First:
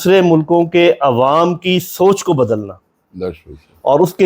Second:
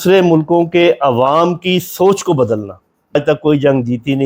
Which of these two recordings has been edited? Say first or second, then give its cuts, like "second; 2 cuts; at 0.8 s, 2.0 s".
second; 1 cut; at 3.1 s